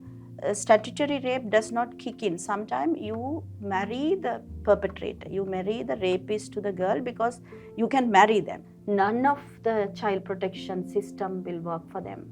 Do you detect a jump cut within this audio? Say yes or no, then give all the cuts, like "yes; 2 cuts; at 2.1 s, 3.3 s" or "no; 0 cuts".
yes; 1 cut; at 8.6 s